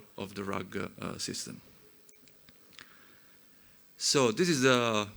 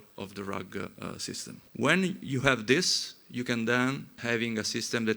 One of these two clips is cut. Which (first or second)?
second